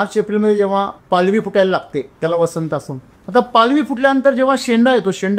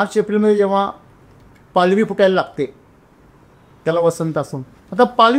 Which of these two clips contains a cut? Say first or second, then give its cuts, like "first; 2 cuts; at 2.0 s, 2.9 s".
first; 2 cuts; at 1.0 s, 2.1 s